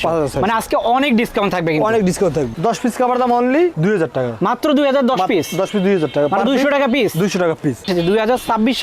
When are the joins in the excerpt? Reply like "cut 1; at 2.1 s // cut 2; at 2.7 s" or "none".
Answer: cut 1; at 2.5 s // cut 2; at 7.9 s